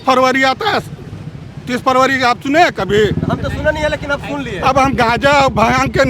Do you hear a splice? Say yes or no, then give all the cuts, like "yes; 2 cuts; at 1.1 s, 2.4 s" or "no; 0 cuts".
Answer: yes; 1 cut; at 4.5 s